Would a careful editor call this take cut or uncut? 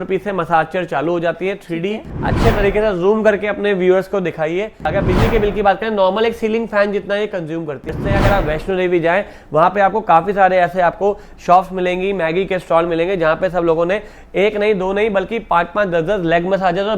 cut